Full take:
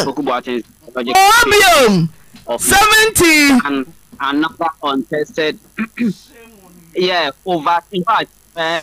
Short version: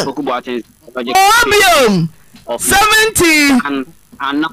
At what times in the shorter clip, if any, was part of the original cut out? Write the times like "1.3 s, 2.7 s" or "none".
none